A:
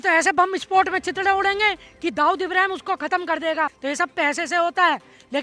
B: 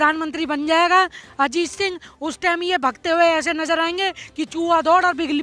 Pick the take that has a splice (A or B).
A